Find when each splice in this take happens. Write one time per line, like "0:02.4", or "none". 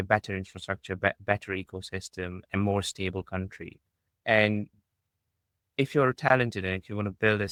none